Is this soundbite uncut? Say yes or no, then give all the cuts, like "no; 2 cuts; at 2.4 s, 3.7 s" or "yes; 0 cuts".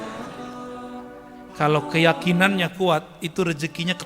no; 1 cut; at 1.3 s